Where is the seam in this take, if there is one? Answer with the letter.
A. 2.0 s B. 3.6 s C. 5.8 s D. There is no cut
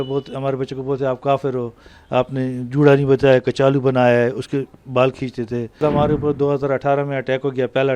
C